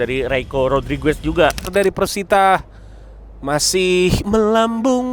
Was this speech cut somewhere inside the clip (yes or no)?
yes